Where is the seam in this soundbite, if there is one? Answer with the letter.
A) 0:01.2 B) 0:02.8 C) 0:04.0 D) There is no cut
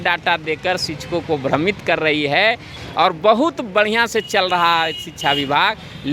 B